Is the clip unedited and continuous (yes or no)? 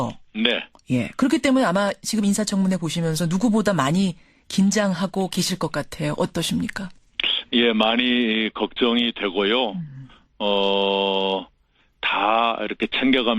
no